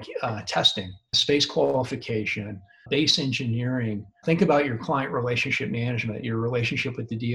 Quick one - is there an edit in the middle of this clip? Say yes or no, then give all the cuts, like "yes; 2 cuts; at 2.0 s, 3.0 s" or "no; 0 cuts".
yes; 3 cuts; at 1.1 s, 2.7 s, 4.2 s